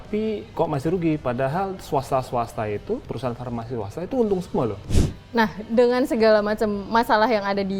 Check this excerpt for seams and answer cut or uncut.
cut